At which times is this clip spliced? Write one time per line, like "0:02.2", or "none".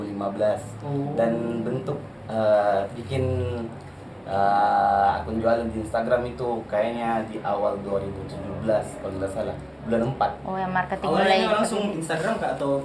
none